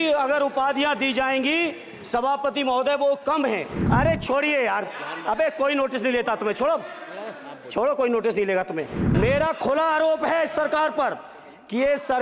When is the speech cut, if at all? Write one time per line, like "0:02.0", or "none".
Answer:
0:03.7
0:09.0